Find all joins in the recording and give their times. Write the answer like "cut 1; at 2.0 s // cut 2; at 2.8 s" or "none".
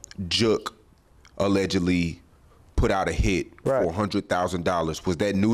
none